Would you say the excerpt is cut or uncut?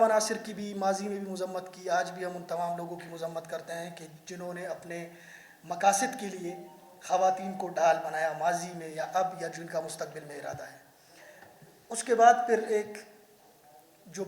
uncut